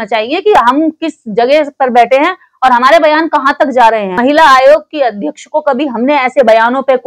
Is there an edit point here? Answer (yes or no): yes